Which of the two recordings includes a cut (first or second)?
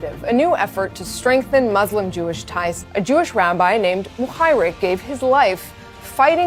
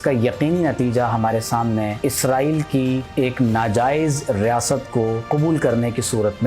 second